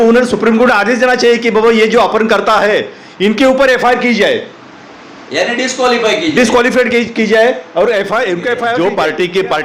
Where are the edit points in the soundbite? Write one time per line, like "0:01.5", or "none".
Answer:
0:08.7